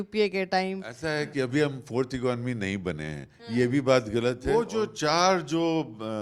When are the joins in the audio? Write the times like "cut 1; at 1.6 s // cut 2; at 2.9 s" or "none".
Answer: cut 1; at 0.9 s // cut 2; at 4.7 s